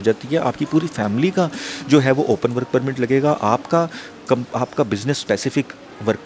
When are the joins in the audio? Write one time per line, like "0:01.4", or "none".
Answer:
none

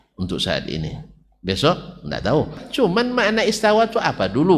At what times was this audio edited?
0:02.7

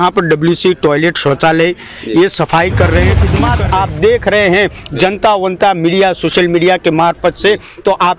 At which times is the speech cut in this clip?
0:03.3

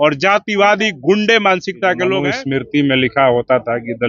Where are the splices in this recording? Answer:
0:02.2

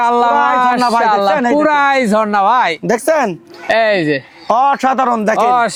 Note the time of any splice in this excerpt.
none

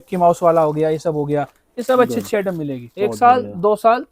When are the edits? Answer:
0:02.8

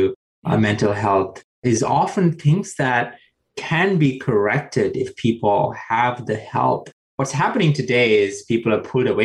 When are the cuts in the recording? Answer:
0:01.8

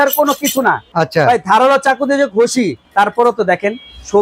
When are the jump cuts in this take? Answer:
0:00.9
0:02.8

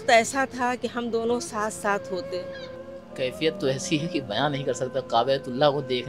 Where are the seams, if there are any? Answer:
0:02.8

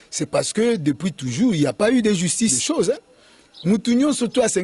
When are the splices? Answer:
0:02.6

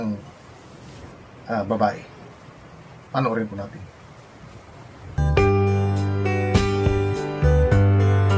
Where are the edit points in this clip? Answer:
0:05.2

